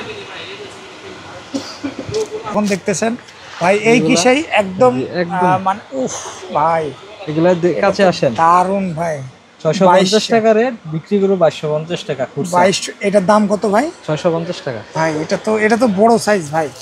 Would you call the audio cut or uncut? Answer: cut